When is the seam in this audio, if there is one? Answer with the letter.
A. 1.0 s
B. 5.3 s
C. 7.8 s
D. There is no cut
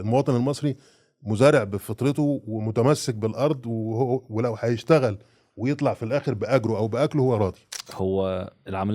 C